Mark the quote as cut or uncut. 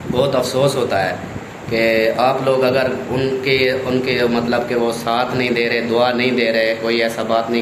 uncut